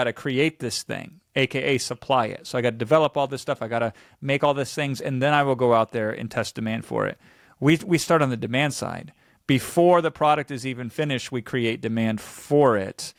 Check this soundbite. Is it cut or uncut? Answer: uncut